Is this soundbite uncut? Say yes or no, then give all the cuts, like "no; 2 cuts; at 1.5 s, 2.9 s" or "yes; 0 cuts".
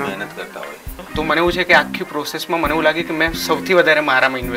no; 1 cut; at 1.0 s